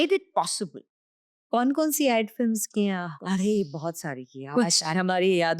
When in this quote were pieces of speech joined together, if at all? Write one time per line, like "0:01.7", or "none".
0:01.4